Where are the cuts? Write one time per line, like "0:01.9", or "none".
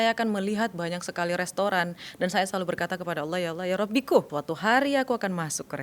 0:04.3